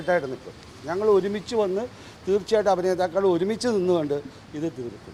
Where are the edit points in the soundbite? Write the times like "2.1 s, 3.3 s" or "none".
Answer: none